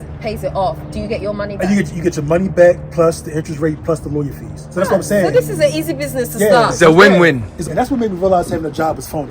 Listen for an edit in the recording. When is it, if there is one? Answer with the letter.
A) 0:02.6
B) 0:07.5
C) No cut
B